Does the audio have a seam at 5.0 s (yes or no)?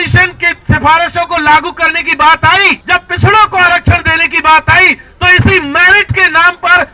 no